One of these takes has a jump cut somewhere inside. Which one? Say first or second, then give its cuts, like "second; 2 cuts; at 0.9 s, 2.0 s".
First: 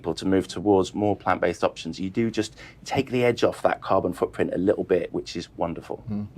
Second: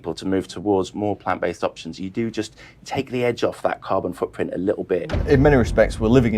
second; 1 cut; at 5.1 s